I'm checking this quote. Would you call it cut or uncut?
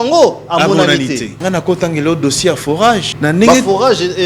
cut